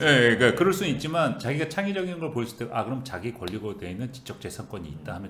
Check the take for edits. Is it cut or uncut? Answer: uncut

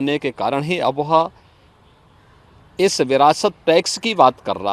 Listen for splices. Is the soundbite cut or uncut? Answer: uncut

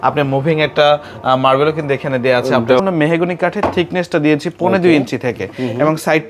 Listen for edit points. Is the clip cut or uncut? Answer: cut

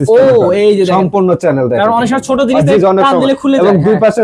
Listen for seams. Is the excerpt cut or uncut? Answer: uncut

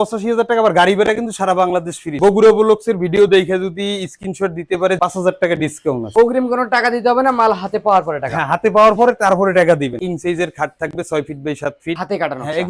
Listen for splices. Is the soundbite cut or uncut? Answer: cut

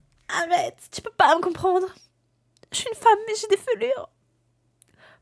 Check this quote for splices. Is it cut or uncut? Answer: uncut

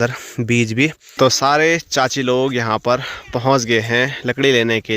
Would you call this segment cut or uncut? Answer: cut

